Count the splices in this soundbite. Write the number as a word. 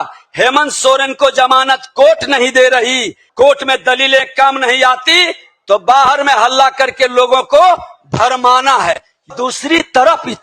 two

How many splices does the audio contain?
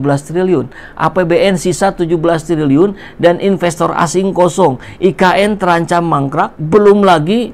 one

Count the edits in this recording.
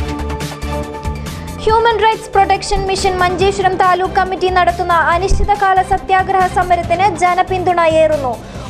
one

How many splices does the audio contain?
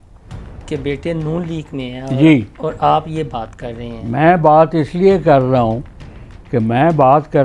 zero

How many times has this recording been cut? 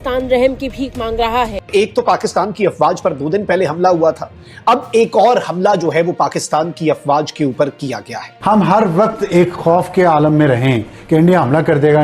two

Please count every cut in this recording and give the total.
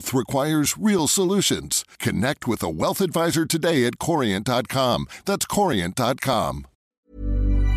one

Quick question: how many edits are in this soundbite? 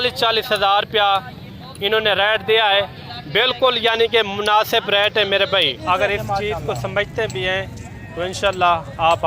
one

